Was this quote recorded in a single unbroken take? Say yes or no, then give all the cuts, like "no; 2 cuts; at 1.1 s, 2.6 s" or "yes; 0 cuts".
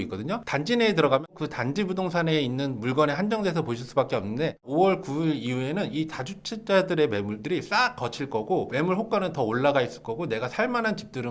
no; 2 cuts; at 1.3 s, 4.7 s